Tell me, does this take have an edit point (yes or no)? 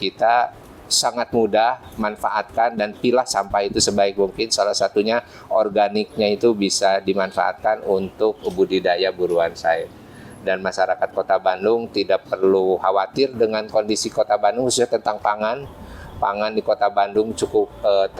no